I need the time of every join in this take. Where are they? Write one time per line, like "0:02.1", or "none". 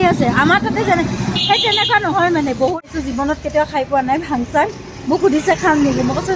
0:02.8